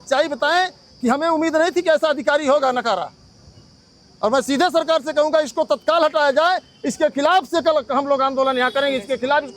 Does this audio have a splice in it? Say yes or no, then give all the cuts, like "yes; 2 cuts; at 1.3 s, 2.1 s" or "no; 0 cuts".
no; 0 cuts